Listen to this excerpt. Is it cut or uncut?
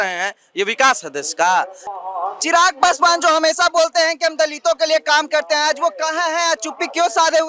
cut